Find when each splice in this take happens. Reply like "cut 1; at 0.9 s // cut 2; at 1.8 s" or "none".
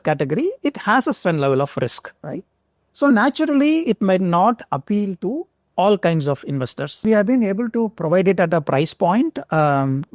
cut 1; at 7.1 s